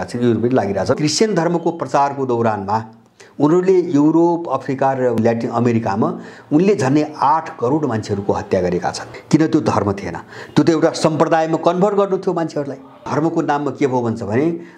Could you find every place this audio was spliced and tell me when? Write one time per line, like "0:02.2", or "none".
0:01.0
0:05.2
0:09.1
0:13.0